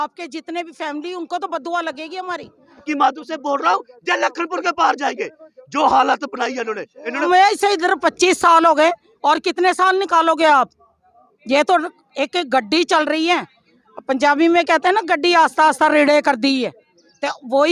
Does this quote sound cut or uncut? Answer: cut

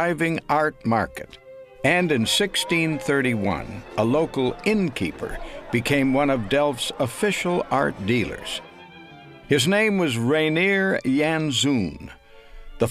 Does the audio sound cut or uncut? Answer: cut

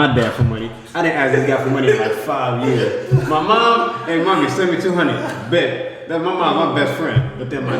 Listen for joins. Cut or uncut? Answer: uncut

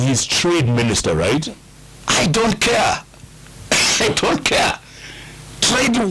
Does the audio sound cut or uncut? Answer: uncut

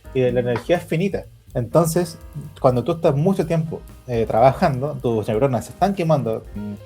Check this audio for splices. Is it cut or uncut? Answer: cut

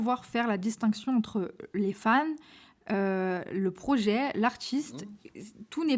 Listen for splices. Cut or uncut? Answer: uncut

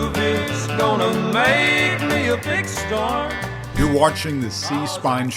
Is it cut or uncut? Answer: cut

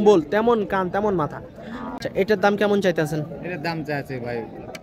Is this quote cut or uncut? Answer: cut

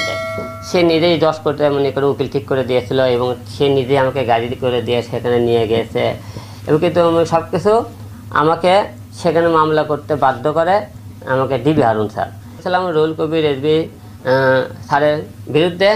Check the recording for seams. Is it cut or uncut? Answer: cut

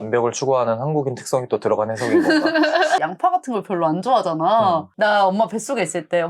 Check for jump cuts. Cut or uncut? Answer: cut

